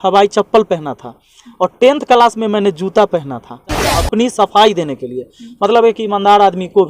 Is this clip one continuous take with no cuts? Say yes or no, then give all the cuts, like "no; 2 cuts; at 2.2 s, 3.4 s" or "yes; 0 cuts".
no; 1 cut; at 3.9 s